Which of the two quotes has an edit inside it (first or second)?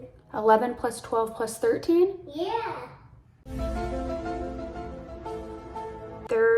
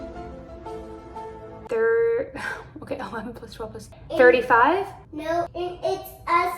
second